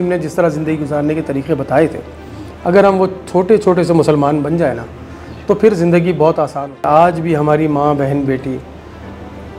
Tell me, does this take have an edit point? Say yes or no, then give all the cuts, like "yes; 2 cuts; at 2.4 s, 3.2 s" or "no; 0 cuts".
yes; 1 cut; at 6.8 s